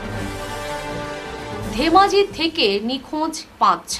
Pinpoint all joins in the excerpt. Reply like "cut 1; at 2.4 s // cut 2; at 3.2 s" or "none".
none

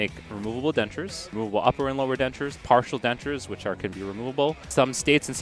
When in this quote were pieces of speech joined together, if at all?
cut 1; at 1.3 s // cut 2; at 4.7 s

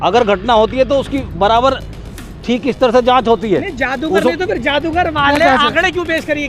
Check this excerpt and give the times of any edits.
none

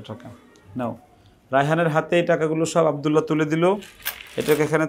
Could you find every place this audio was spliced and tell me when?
none

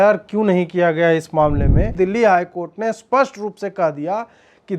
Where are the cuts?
cut 1; at 1.9 s

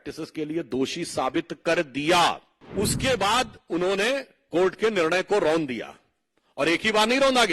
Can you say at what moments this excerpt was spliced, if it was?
cut 1; at 2.5 s

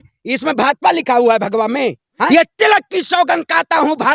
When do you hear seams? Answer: cut 1; at 2.3 s

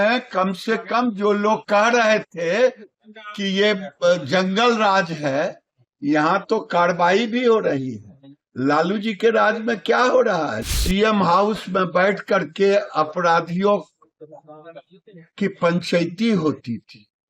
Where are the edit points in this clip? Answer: cut 1; at 10.6 s

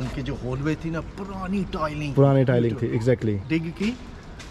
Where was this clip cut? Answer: none

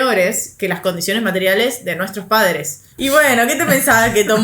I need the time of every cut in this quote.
cut 1; at 2.9 s

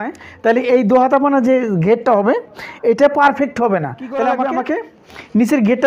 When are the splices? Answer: cut 1; at 4.3 s

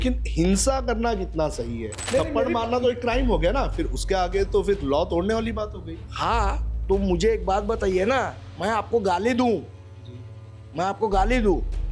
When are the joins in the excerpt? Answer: cut 1; at 1.9 s

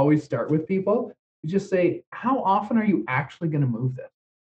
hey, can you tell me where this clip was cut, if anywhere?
cut 1; at 1.1 s

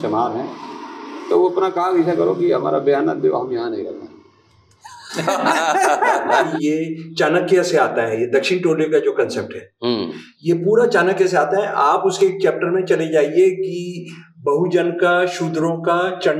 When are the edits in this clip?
cut 1; at 6.5 s

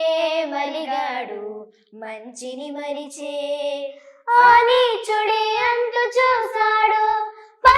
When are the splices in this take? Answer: none

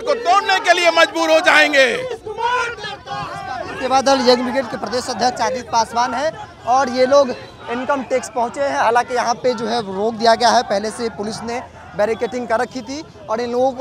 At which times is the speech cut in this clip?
none

